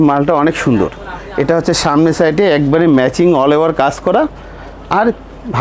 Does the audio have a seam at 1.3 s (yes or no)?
no